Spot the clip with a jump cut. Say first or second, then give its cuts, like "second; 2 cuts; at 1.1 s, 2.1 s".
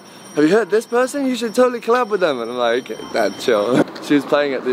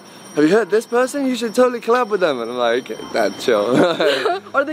first; 1 cut; at 3.8 s